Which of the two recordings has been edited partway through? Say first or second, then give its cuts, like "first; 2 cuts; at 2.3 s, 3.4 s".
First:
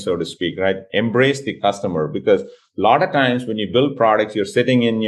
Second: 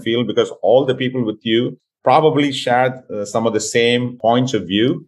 second; 2 cuts; at 1.8 s, 4.1 s